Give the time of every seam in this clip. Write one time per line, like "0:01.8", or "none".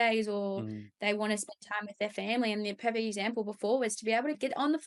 none